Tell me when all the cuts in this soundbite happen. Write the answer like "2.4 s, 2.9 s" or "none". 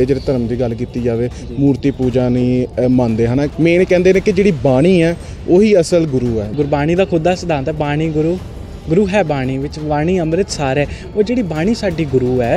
3.5 s, 6.5 s